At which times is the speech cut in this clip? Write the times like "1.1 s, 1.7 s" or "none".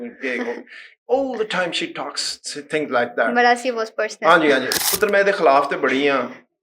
4.7 s